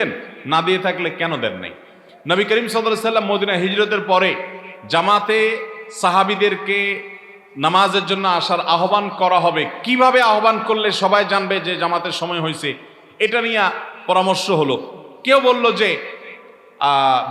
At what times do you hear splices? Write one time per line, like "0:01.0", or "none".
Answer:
none